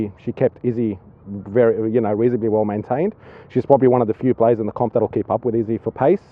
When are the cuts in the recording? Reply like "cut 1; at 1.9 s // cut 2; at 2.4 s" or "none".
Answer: none